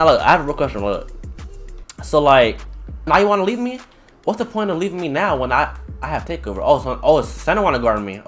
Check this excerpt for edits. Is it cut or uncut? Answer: cut